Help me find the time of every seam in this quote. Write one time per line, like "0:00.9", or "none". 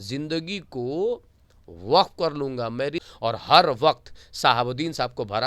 0:03.0